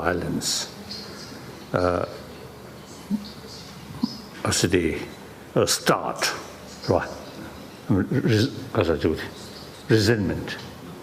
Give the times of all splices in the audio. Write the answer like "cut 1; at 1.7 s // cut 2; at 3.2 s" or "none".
none